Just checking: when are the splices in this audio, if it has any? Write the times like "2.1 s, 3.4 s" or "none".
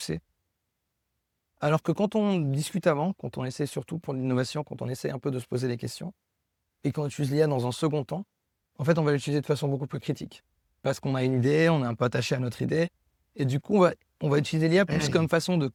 none